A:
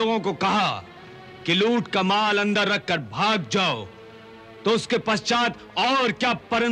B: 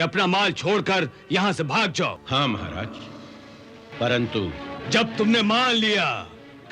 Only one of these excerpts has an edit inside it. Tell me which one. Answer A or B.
B